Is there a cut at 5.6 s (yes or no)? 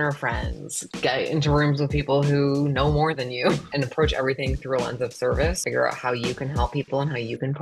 yes